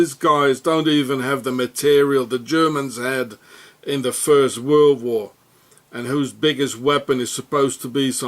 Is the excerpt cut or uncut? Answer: cut